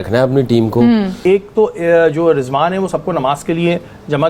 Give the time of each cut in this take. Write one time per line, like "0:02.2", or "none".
0:01.2